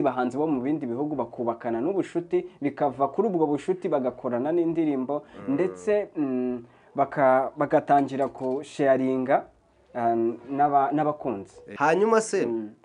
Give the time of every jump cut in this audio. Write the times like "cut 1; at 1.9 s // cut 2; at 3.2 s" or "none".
cut 1; at 11.6 s